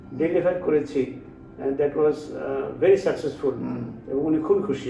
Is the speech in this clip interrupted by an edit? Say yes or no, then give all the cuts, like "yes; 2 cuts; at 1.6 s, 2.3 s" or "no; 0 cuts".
no; 0 cuts